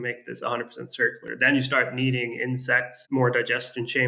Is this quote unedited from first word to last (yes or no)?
no